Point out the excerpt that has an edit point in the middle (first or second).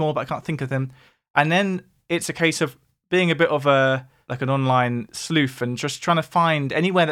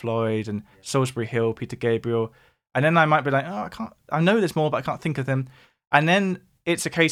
first